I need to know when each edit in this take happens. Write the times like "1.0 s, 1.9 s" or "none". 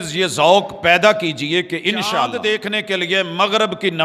2.4 s